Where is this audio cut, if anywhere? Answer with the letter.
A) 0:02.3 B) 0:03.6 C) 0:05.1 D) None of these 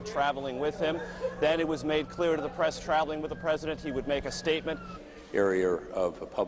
D